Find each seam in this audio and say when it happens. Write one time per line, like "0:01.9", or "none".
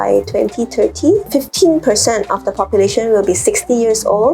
0:01.3